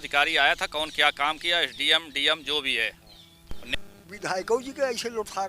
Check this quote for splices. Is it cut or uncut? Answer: cut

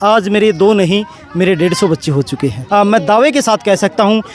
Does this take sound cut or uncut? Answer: cut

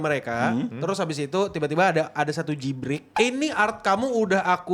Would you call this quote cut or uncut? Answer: cut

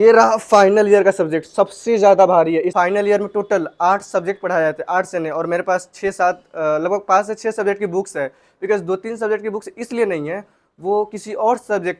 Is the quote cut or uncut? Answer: uncut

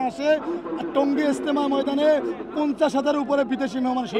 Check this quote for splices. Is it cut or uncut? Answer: uncut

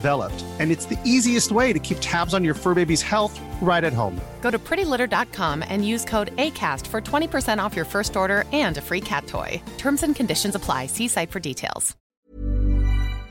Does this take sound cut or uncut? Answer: cut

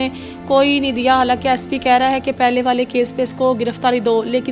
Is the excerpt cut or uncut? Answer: uncut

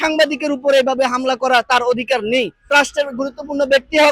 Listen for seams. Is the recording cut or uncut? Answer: cut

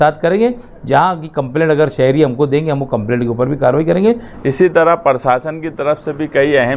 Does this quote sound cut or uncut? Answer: cut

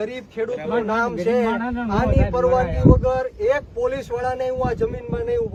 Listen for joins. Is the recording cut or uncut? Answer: uncut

